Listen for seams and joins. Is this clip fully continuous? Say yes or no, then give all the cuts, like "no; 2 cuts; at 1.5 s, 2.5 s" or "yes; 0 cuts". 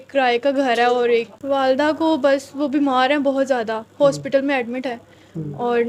no; 1 cut; at 1.3 s